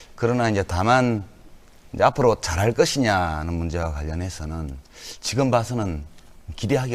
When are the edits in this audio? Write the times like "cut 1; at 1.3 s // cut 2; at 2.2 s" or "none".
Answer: none